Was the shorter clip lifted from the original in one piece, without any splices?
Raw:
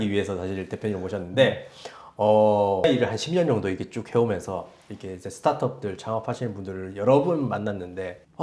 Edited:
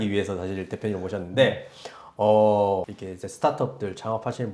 no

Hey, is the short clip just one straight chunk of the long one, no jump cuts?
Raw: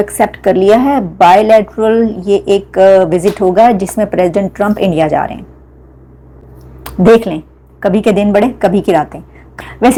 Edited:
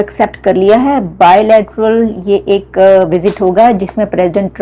yes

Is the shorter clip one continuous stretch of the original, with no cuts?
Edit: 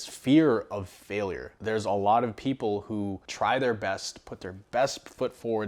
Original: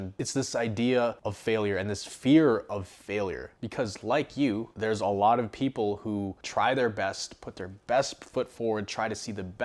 no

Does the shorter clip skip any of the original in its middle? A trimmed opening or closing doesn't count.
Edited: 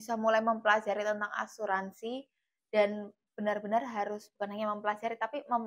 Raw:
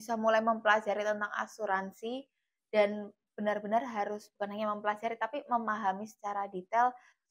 no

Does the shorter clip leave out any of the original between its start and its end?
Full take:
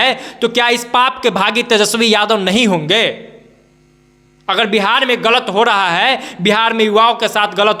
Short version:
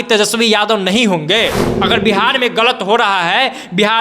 yes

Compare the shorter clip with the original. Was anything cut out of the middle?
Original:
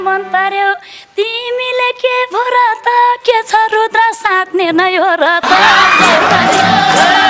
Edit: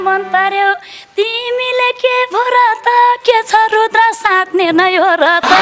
no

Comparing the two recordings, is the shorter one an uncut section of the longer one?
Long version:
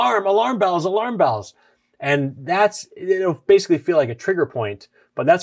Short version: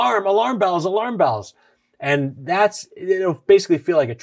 yes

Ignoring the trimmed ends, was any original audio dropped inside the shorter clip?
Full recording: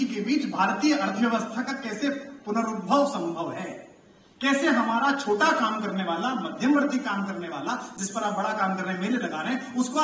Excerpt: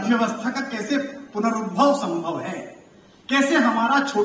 no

